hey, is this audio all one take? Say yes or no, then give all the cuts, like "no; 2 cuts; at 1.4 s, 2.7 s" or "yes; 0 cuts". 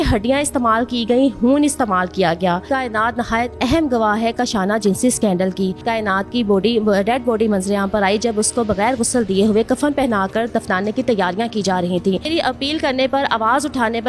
no; 3 cuts; at 2.7 s, 5.8 s, 12.2 s